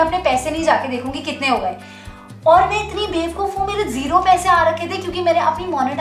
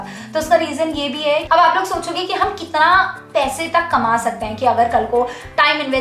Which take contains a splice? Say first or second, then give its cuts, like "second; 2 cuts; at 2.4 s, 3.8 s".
second; 1 cut; at 1.5 s